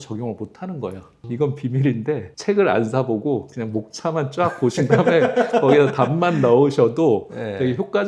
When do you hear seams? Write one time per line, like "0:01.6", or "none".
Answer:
0:01.1